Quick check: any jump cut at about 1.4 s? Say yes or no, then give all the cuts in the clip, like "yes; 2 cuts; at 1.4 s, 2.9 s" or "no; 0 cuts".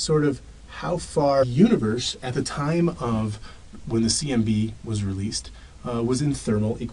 no; 0 cuts